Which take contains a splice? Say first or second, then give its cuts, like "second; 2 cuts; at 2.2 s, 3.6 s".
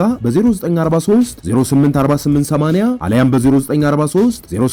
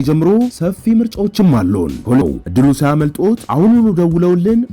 second; 1 cut; at 2.2 s